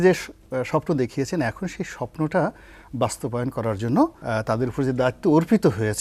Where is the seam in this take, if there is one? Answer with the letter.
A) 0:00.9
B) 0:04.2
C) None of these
B